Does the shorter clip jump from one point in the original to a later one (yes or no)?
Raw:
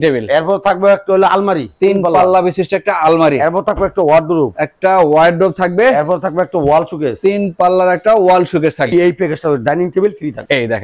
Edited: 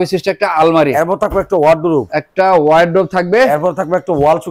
no